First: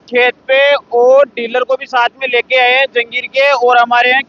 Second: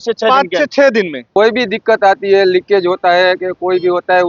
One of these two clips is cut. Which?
second; 1 cut; at 1.2 s

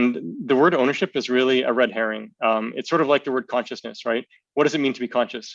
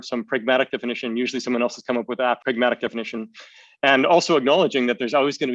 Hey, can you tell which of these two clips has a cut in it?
second; 1 cut; at 2.4 s

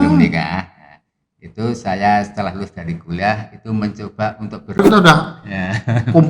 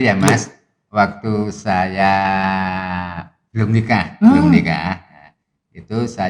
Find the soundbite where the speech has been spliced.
first; 1 cut; at 4.8 s

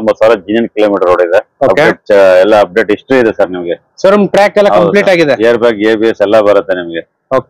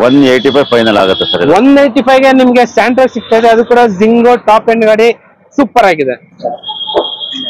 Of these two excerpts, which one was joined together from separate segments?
second; 1 cut; at 6.3 s

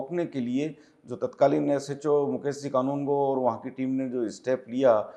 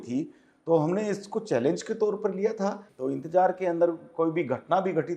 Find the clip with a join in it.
second; 1 cut; at 2.8 s

